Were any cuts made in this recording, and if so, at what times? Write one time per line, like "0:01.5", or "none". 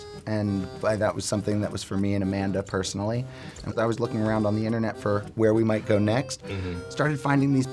0:03.7